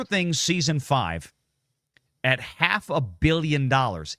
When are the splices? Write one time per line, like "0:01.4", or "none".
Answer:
none